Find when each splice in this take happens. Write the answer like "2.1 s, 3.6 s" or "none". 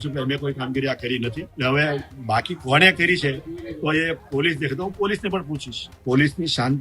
1.5 s, 6.0 s